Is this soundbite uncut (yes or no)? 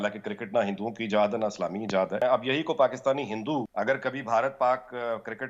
no